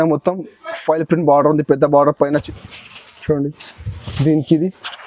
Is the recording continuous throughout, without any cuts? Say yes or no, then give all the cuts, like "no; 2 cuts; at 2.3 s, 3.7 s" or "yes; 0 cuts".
no; 1 cut; at 2.4 s